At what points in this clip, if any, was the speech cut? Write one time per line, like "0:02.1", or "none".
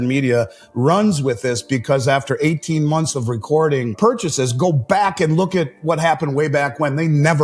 0:03.9